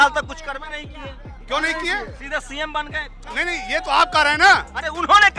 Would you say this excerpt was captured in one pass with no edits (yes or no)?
no